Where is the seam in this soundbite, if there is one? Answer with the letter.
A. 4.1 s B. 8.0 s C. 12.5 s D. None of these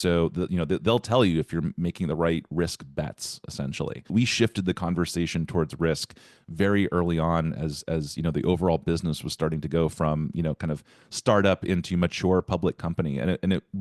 A